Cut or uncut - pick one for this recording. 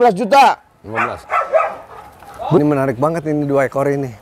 cut